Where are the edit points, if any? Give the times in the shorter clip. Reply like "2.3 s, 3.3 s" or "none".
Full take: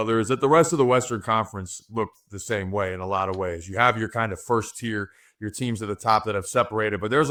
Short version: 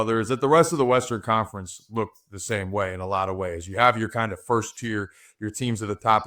none